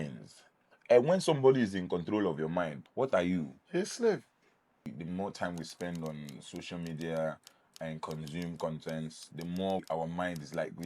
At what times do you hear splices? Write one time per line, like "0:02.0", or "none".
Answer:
0:02.8
0:03.6
0:04.9
0:09.8